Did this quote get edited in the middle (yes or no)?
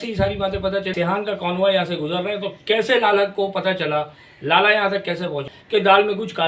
yes